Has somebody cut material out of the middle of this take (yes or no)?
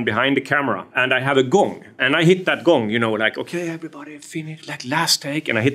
yes